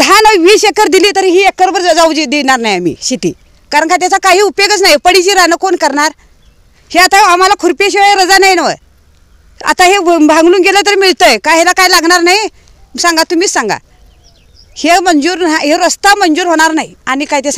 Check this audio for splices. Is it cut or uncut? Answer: uncut